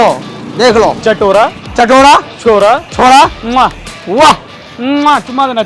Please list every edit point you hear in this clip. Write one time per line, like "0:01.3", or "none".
0:01.0